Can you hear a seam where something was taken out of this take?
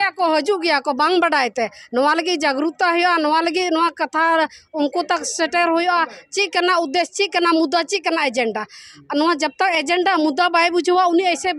no; 0 cuts

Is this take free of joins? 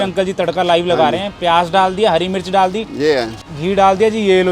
no; 1 cut; at 3.4 s

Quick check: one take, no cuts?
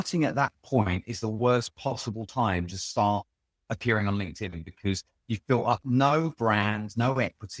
yes; 0 cuts

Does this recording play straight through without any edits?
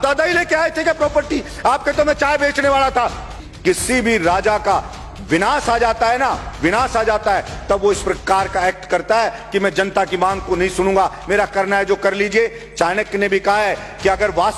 no; 1 cut; at 3.4 s

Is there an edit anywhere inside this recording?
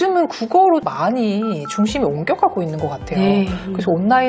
no; 0 cuts

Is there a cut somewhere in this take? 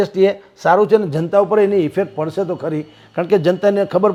no; 0 cuts

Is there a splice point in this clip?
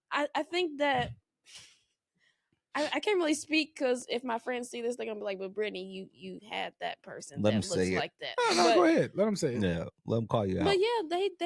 no; 0 cuts

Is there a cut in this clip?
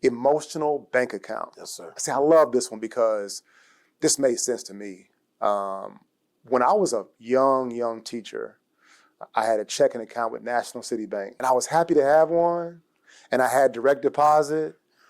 yes; 1 cut; at 11.3 s

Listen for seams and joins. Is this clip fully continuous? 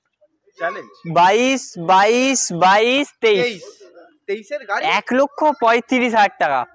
yes; 0 cuts

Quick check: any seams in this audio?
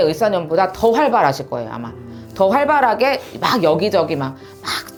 no; 0 cuts

